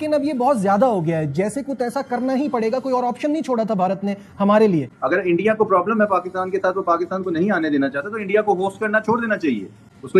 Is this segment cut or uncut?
cut